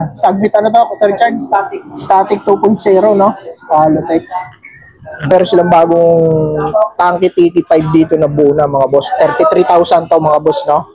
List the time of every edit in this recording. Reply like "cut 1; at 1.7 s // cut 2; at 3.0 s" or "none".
cut 1; at 5.3 s